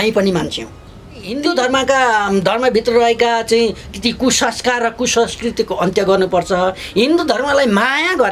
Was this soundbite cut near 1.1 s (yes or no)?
yes